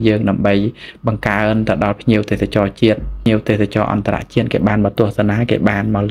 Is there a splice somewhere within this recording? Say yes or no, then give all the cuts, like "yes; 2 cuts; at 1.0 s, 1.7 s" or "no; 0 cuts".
yes; 1 cut; at 3.3 s